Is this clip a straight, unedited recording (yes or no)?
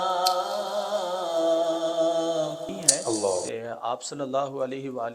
no